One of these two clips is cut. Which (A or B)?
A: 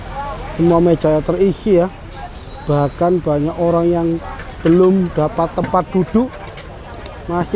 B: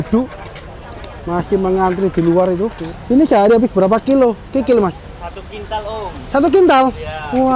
B